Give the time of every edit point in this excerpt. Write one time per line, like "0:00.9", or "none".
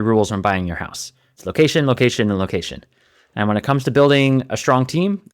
0:01.4